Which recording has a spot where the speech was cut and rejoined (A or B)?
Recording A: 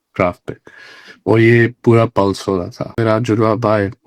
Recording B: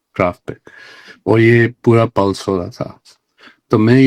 A